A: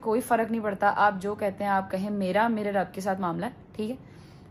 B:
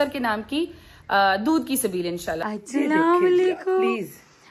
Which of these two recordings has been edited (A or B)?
B